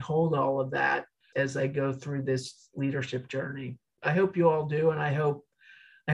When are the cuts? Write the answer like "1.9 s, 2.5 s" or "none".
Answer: 1.2 s, 4.0 s